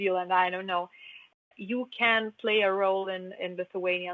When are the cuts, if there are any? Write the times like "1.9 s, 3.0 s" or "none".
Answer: none